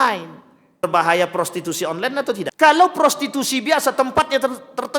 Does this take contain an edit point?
yes; 2 cuts; at 0.8 s, 2.5 s

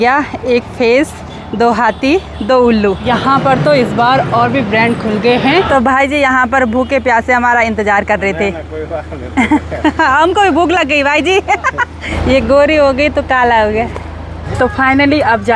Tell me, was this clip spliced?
yes; 4 cuts; at 3.0 s, 5.7 s, 12.1 s, 14.5 s

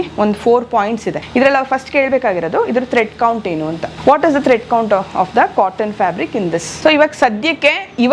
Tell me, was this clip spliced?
yes; 3 cuts; at 1.2 s, 3.9 s, 6.7 s

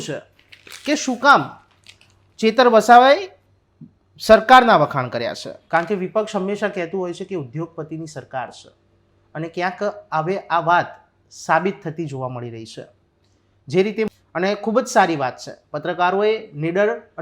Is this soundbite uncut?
no; 2 cuts; at 5.5 s, 14.1 s

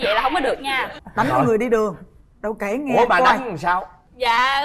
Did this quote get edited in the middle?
yes; 1 cut; at 0.9 s

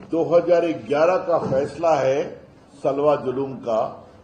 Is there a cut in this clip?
no; 0 cuts

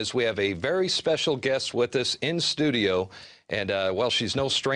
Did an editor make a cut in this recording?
no; 0 cuts

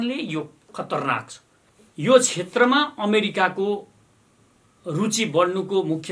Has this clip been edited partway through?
yes; 1 cut; at 1.8 s

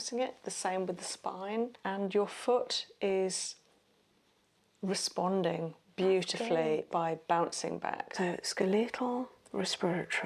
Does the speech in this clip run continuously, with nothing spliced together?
no; 2 cuts; at 1.7 s, 8.1 s

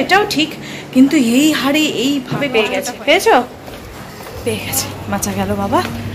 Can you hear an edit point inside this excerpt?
yes; 1 cut; at 2.6 s

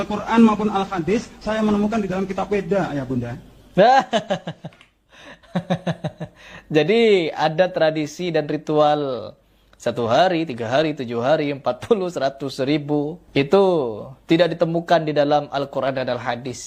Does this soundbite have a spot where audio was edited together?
no; 0 cuts

